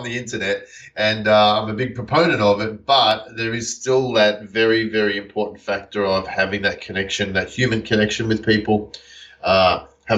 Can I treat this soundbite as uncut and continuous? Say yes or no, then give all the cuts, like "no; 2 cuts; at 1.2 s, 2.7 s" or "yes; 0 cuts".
yes; 0 cuts